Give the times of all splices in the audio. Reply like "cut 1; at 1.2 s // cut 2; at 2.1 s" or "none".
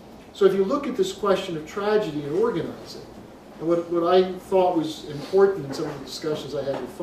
none